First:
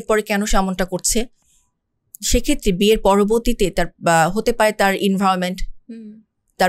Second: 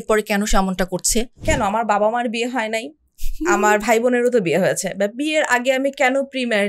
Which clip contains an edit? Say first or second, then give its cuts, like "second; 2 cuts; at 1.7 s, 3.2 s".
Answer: second; 1 cut; at 1.4 s